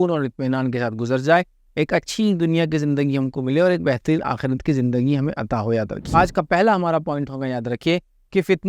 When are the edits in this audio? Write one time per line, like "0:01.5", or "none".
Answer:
0:06.1